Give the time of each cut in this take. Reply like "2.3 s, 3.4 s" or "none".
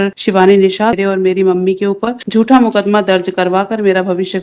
1.0 s, 2.1 s